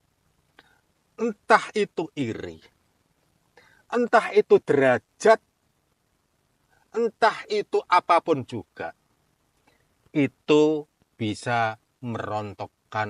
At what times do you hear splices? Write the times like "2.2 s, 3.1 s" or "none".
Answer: none